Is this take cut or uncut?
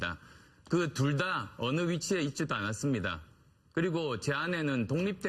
uncut